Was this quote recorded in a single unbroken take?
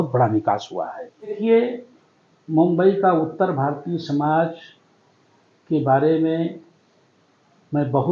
no; 1 cut; at 1.4 s

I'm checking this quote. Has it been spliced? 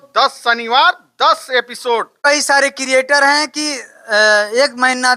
yes; 1 cut; at 2.2 s

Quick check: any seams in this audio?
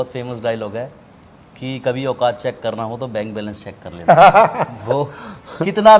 no; 0 cuts

